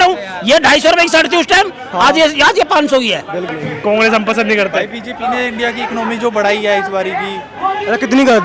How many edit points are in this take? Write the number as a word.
one